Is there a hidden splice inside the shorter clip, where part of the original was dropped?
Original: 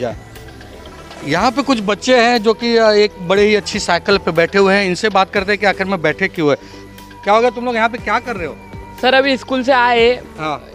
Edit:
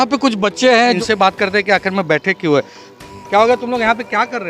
yes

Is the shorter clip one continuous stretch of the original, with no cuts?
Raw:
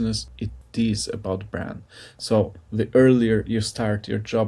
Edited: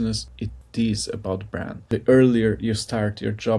no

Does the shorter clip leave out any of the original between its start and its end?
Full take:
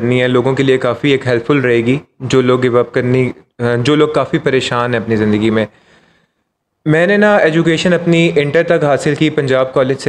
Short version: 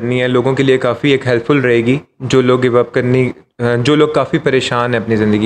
no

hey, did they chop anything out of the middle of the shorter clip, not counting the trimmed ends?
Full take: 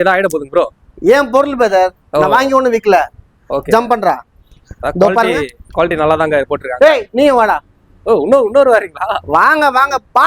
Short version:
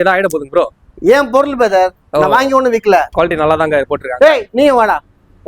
yes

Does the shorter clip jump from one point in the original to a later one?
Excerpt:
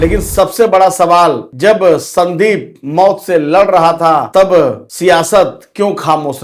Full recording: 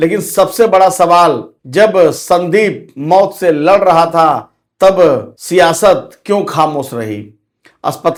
yes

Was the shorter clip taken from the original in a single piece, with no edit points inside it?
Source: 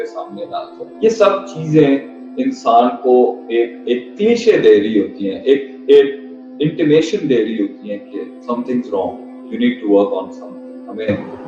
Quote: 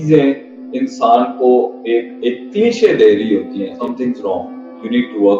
no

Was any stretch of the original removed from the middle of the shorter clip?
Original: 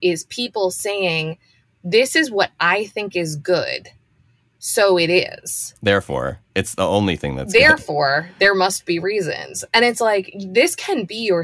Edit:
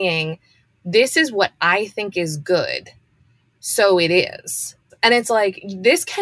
yes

